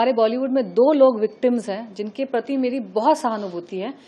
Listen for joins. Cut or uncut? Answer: uncut